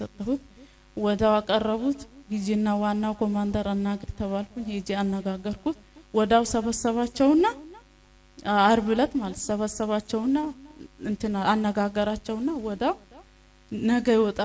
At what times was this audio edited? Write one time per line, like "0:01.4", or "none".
none